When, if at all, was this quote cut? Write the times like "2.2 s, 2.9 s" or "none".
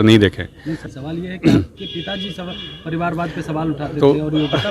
0.9 s